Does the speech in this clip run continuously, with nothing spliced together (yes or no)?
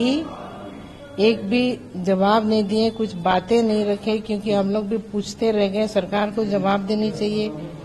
yes